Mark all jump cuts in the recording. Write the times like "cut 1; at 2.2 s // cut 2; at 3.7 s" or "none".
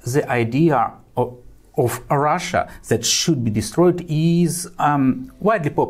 none